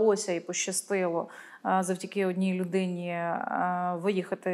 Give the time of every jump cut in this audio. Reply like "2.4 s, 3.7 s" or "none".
none